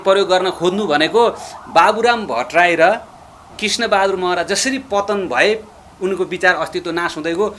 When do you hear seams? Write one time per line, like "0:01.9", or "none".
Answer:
none

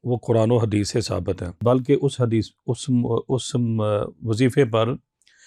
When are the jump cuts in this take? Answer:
none

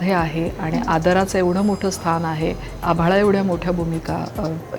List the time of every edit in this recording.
0:02.7

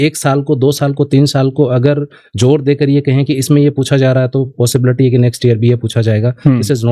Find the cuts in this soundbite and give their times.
none

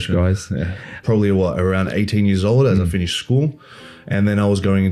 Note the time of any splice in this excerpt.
0:01.0

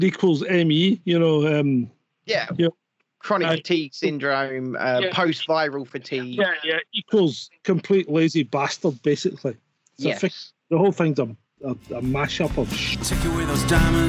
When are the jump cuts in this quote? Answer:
0:12.8

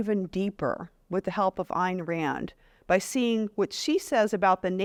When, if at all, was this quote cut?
none

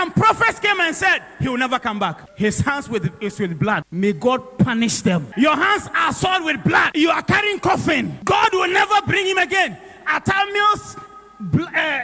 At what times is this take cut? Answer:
0:02.2
0:03.9
0:05.3
0:06.9
0:08.1

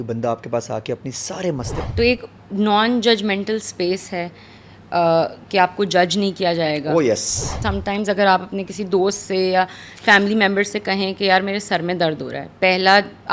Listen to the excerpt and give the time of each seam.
0:01.9
0:07.6

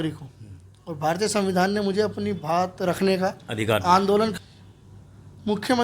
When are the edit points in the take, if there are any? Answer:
0:04.3

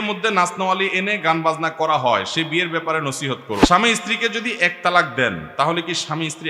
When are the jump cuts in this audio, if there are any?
0:03.7

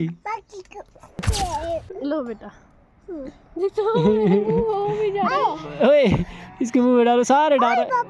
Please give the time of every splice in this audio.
0:01.3

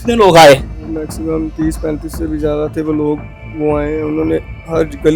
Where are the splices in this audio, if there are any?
none

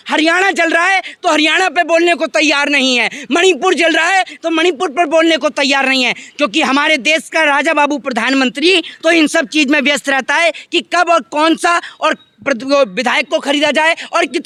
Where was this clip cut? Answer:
none

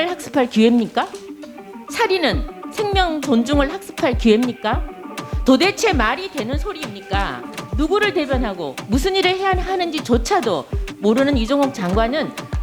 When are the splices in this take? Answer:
0:07.6

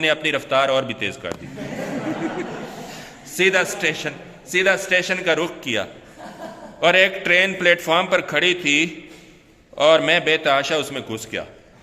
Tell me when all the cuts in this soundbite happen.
none

